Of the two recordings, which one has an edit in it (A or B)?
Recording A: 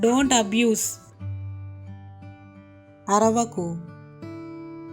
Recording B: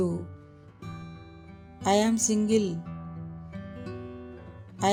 A